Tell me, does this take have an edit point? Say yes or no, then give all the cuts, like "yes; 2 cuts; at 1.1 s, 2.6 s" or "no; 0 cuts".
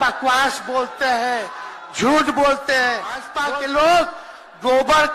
yes; 1 cut; at 3.3 s